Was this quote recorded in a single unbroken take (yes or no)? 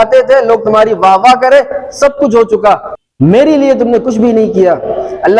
no